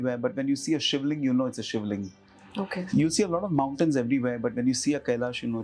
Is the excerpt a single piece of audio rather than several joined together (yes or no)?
yes